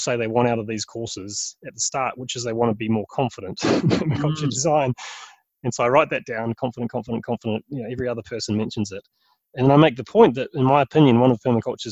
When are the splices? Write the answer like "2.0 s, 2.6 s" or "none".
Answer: none